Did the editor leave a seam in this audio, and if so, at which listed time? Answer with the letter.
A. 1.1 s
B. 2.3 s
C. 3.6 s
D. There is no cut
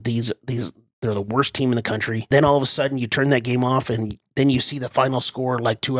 B